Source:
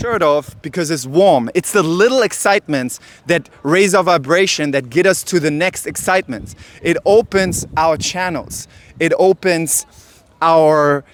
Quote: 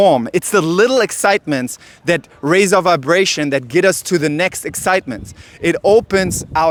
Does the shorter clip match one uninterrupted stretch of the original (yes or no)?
yes